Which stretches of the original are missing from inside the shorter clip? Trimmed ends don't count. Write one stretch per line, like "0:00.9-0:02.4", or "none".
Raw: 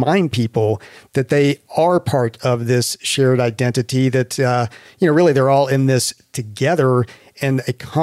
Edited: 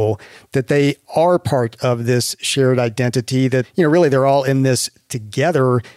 0:04.3-0:04.9